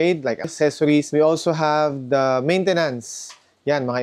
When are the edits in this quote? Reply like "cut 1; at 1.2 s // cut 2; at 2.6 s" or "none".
cut 1; at 1.1 s